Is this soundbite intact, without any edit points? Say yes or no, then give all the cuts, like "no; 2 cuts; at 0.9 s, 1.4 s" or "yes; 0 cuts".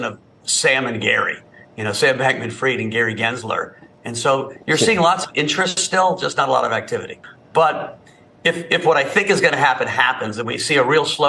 no; 1 cut; at 7.1 s